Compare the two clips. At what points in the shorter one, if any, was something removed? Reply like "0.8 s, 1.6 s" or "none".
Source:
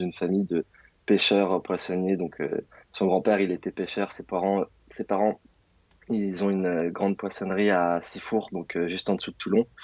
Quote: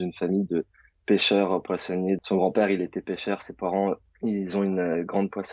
2.2 s, 4.1 s